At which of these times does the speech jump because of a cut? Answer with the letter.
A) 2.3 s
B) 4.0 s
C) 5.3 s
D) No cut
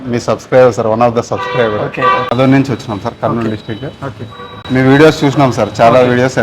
A